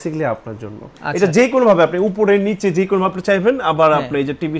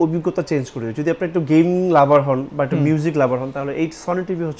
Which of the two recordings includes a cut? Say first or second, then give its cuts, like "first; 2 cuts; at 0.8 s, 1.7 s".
first; 1 cut; at 1.0 s